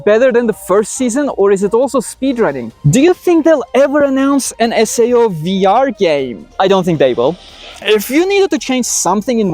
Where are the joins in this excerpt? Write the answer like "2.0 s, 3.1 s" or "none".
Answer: 2.7 s, 7.8 s